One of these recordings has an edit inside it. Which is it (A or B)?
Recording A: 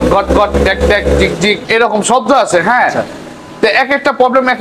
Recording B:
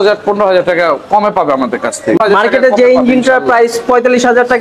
B